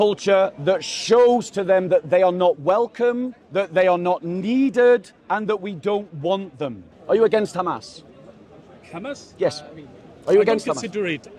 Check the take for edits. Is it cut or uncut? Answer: cut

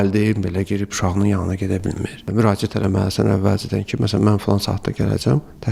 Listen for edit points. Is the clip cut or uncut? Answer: uncut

